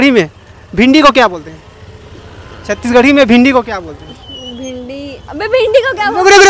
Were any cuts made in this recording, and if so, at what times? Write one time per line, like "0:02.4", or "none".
none